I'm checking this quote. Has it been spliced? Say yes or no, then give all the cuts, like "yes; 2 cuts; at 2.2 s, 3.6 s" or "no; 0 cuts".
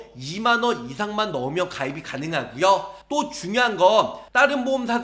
no; 0 cuts